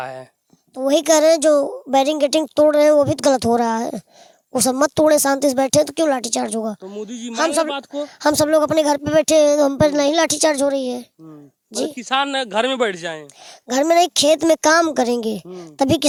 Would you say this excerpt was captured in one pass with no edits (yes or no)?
yes